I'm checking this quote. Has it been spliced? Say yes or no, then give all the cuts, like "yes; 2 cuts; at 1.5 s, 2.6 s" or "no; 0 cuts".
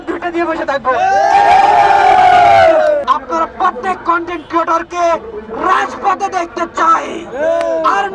yes; 1 cut; at 3.0 s